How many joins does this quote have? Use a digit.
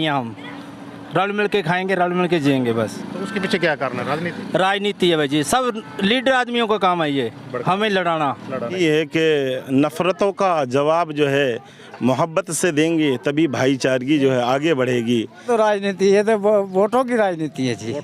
2